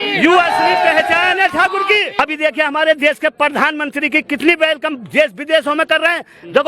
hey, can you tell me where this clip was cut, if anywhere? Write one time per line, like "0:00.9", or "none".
0:02.1